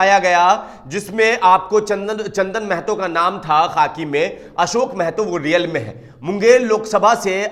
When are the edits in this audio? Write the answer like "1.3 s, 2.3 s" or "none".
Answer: none